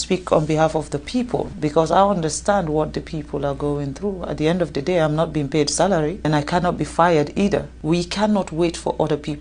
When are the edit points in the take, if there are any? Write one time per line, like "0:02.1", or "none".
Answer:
0:01.5
0:06.3
0:07.7